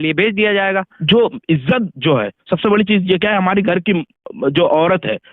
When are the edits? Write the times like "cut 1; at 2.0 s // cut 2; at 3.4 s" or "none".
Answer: cut 1; at 0.9 s